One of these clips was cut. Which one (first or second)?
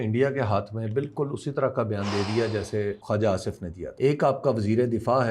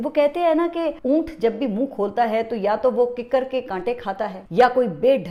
first